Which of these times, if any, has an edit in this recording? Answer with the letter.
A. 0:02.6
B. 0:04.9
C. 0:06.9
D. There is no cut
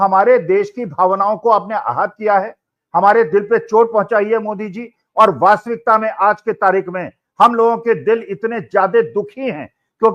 D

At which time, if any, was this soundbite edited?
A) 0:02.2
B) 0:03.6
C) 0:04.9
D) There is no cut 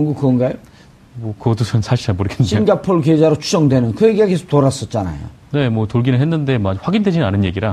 B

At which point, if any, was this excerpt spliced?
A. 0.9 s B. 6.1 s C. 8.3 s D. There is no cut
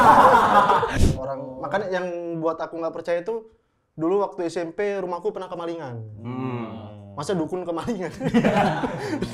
A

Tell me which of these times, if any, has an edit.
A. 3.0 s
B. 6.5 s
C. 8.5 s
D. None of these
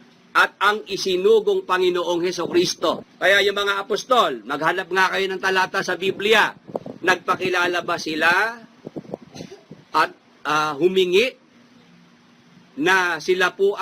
A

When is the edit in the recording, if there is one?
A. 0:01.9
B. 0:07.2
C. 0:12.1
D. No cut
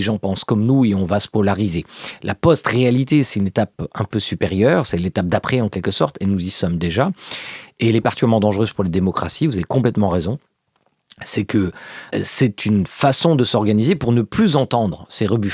C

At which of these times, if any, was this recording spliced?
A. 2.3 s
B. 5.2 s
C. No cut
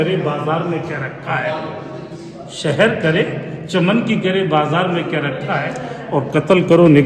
C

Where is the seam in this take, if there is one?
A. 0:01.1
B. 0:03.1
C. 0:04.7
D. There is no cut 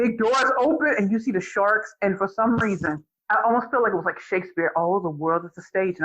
B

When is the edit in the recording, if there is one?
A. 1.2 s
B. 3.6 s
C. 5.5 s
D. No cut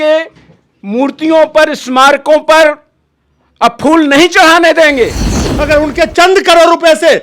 C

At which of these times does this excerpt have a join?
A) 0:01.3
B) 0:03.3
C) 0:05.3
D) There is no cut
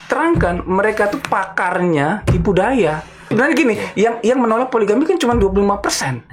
B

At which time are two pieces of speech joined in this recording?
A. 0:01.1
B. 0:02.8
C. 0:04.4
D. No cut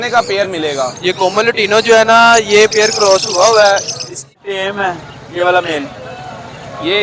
C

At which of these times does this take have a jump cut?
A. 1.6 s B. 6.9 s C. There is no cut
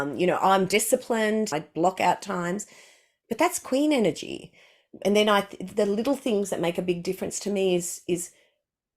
A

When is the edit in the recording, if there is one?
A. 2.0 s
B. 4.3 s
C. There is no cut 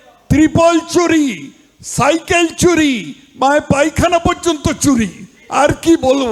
C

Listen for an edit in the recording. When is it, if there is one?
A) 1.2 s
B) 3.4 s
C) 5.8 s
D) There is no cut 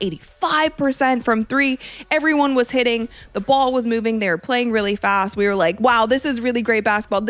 D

